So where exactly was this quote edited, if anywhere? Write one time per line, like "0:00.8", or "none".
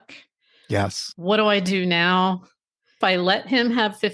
0:01.0
0:03.0